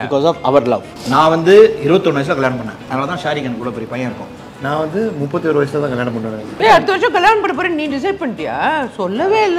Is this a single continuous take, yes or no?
no